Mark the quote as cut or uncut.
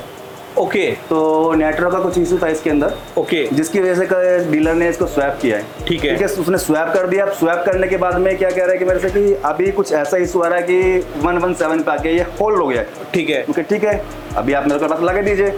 uncut